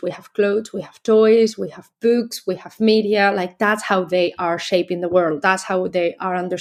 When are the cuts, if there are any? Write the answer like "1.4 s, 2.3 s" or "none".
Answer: none